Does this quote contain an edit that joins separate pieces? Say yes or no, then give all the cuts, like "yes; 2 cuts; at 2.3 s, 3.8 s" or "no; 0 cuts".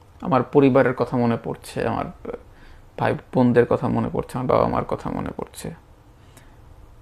no; 0 cuts